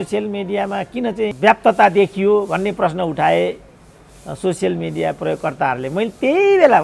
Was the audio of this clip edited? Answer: yes; 1 cut; at 1.4 s

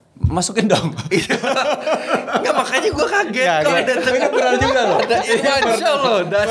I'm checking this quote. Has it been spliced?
no; 0 cuts

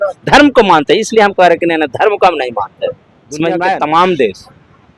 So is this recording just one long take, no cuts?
no; 1 cut; at 3.8 s

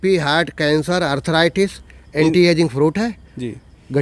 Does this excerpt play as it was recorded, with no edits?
yes; 0 cuts

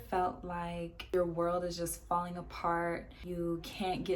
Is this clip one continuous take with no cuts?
no; 2 cuts; at 1.0 s, 3.2 s

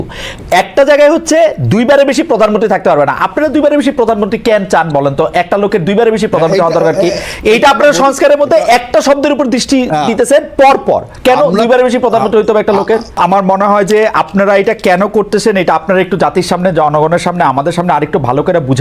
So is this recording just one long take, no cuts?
no; 1 cut; at 13.2 s

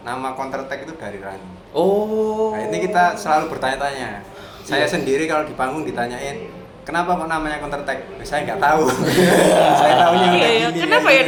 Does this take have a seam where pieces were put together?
no; 0 cuts

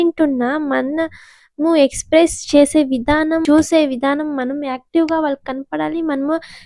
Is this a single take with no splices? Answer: no; 1 cut; at 3.4 s

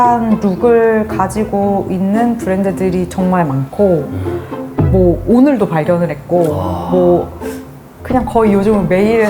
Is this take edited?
no; 0 cuts

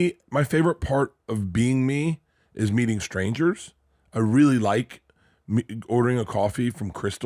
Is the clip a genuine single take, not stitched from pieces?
yes; 0 cuts

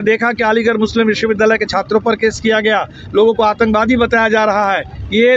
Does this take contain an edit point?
no; 0 cuts

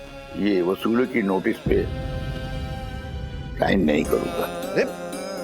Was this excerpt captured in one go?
no; 3 cuts; at 1.9 s, 3.5 s, 4.4 s

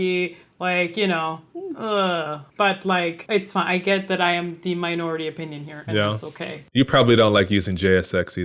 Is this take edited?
yes; 3 cuts; at 2.4 s, 3.2 s, 6.6 s

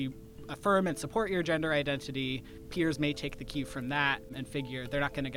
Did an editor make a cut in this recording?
yes; 2 cuts; at 2.6 s, 4.3 s

